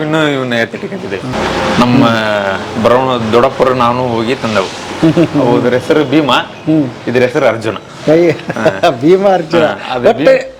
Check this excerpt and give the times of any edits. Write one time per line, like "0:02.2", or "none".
0:01.3